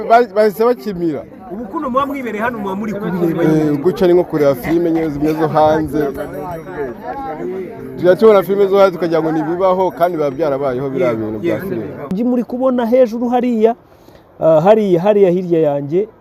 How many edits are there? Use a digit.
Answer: 1